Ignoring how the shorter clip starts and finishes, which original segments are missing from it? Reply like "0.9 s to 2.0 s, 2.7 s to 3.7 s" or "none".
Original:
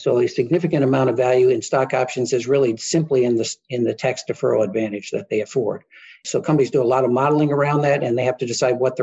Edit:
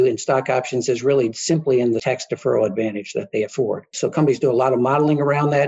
3.5 s to 4.0 s, 5.9 s to 6.2 s